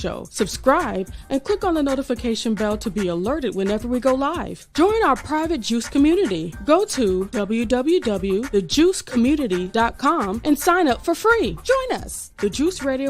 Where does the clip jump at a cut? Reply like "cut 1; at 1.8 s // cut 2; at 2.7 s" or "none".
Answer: cut 1; at 11.7 s